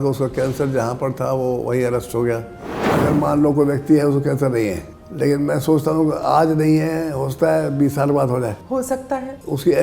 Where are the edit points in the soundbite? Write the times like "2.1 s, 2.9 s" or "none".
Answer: 2.8 s, 8.9 s